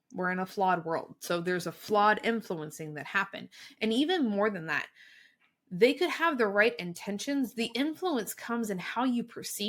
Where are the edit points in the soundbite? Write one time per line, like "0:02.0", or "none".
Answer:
none

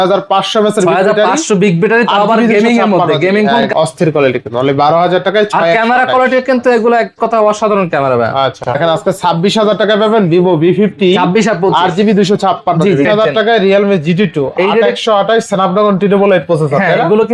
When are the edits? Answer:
0:03.7
0:08.8
0:13.1

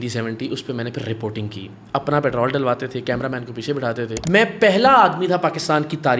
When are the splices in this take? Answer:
0:04.2

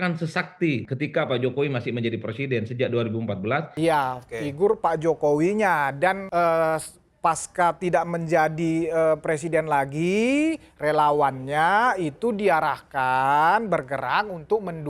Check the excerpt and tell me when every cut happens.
0:00.9
0:03.7
0:06.2

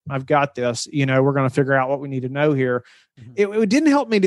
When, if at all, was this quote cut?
0:02.9

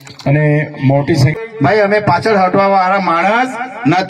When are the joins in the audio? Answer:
0:01.4

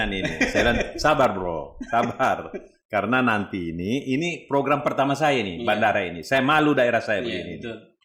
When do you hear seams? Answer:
none

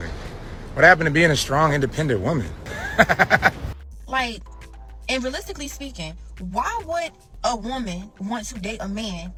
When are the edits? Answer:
none

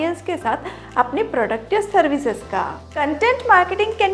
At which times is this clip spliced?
0:02.9

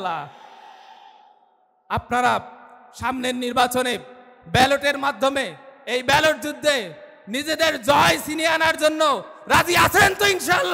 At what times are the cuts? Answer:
none

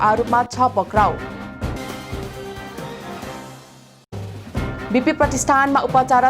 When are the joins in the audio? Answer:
0:01.8
0:04.3

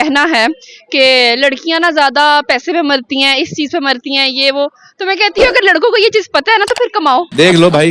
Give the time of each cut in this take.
none

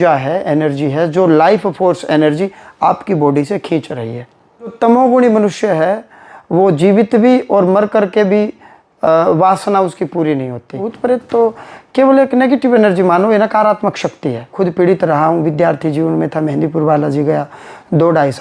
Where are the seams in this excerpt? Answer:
0:04.7
0:10.9
0:14.5

